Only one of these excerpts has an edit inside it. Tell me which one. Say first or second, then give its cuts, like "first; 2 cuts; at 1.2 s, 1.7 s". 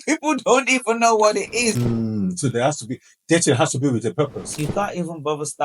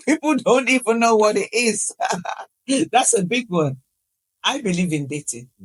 first; 2 cuts; at 1.8 s, 4.5 s